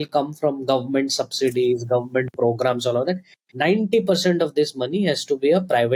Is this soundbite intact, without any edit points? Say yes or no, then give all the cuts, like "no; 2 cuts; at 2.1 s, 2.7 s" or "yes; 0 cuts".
yes; 0 cuts